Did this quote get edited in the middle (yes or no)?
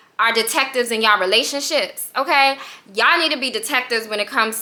no